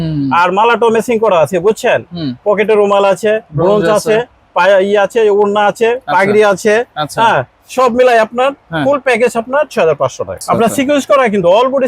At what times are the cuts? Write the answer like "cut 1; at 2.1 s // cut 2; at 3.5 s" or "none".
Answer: cut 1; at 10.4 s